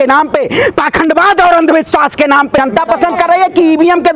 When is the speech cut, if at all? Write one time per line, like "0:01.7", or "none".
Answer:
0:02.6